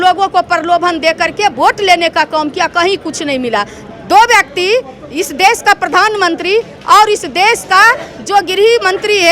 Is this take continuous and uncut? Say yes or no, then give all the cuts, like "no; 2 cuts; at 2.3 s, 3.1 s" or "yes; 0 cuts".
no; 1 cut; at 3.8 s